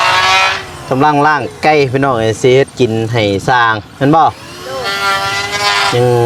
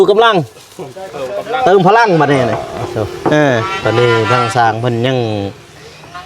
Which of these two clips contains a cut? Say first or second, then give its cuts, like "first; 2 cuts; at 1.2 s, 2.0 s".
second; 1 cut; at 3.7 s